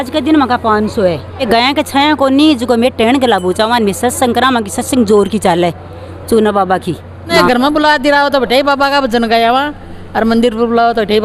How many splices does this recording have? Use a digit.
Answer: 2